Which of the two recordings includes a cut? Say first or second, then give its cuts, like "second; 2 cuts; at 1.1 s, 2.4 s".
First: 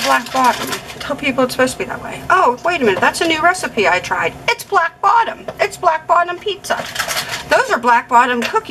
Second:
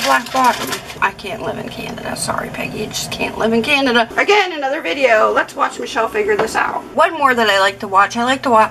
second; 3 cuts; at 0.9 s, 4.1 s, 6.9 s